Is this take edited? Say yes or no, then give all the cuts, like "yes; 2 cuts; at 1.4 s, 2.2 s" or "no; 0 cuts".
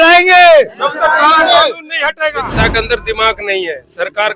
yes; 1 cut; at 2.5 s